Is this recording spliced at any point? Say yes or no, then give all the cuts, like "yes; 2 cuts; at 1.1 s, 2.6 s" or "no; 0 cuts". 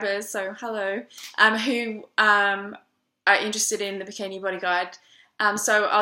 yes; 1 cut; at 1.9 s